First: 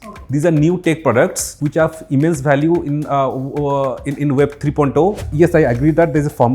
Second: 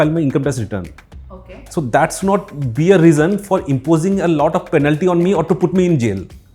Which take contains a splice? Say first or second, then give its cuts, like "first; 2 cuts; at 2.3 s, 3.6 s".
first; 2 cuts; at 1.5 s, 5.3 s